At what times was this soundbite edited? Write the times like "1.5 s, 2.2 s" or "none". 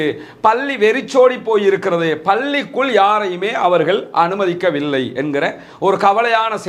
none

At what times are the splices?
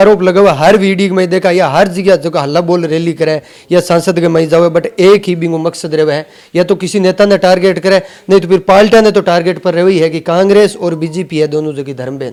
none

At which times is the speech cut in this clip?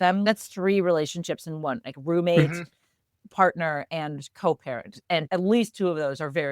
3.2 s, 5.2 s

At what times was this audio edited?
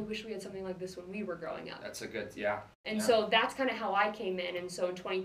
none

